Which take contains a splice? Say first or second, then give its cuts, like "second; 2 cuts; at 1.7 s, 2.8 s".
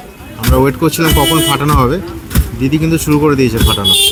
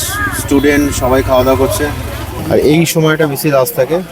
second; 1 cut; at 2.3 s